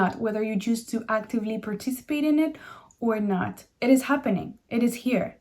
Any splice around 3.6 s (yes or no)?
yes